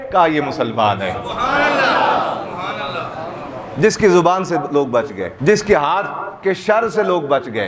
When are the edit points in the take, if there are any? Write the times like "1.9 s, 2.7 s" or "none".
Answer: none